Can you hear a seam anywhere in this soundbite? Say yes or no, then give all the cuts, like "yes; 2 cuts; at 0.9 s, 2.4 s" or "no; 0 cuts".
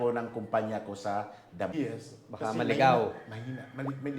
yes; 1 cut; at 1.7 s